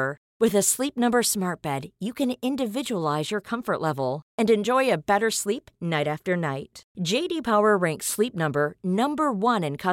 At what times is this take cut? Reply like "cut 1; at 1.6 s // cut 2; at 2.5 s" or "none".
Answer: none